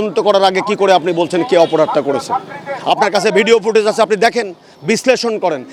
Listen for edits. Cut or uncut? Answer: uncut